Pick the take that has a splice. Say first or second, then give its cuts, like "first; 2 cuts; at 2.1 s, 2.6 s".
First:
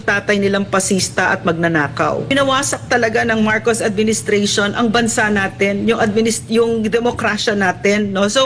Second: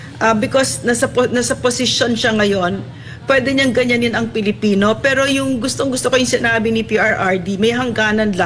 first; 1 cut; at 2.3 s